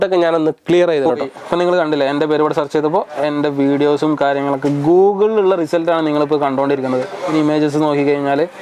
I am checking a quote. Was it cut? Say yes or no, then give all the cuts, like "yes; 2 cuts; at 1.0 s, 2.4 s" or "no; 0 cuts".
yes; 2 cuts; at 1.4 s, 7.2 s